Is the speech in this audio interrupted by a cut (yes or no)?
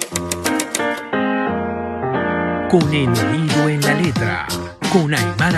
no